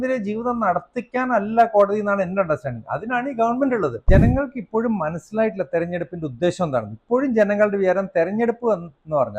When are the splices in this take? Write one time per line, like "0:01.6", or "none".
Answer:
0:04.1

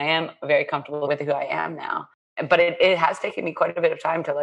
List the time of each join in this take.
0:01.1
0:02.2

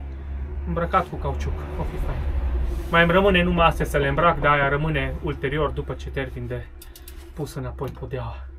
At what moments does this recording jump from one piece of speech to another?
none

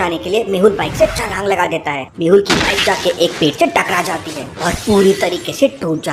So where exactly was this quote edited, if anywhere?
none

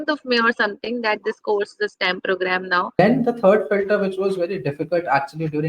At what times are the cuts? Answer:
0:03.0

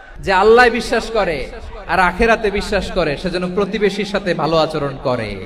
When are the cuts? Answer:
none

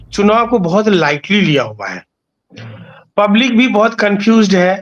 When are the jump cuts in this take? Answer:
none

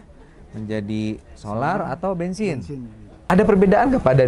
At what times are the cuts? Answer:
0:03.3

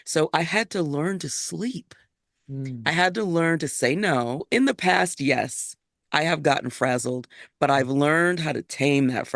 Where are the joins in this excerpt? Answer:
0:04.5

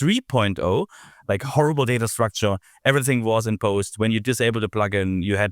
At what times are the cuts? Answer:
0:01.0

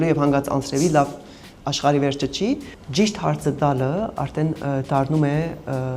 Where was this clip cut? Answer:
0:02.7

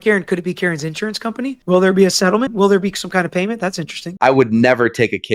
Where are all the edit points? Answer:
0:01.6
0:02.5
0:04.0

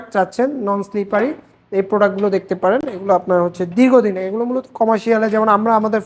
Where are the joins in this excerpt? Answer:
none

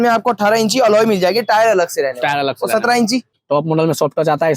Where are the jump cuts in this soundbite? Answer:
0:03.4

